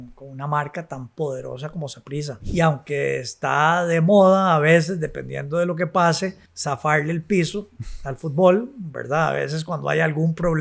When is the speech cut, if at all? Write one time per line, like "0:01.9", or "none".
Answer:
0:02.4
0:06.5